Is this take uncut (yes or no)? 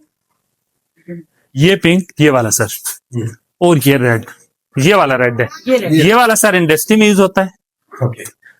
yes